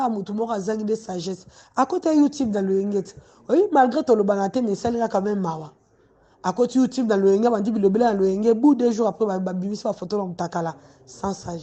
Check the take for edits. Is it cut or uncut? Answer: uncut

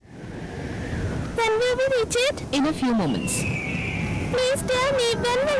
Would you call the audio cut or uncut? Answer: cut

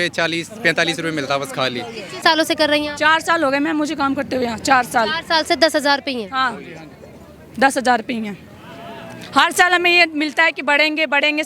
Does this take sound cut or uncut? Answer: cut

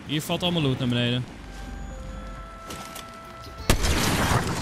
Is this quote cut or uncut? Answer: cut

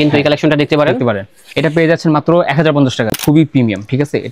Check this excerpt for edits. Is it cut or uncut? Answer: cut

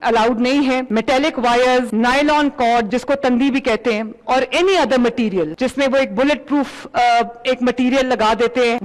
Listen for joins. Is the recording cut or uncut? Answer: uncut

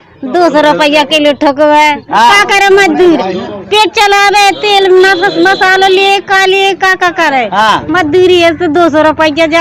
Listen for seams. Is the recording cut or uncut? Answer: uncut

